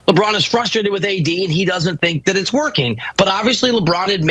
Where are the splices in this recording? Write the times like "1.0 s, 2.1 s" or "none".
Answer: 3.0 s